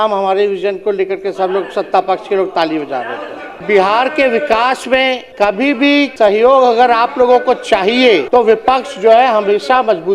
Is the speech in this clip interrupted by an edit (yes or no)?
yes